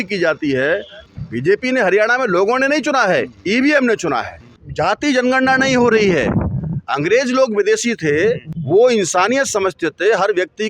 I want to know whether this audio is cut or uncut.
cut